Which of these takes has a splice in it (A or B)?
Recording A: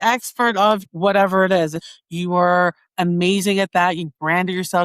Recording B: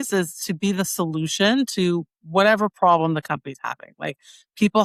A